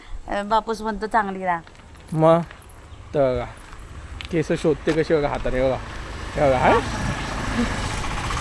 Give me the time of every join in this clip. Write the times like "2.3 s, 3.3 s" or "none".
none